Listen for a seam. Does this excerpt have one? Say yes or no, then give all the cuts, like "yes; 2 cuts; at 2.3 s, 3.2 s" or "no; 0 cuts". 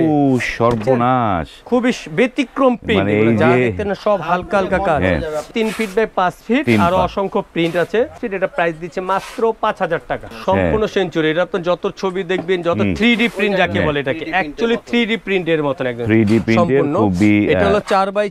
yes; 3 cuts; at 5.5 s, 8.2 s, 10.3 s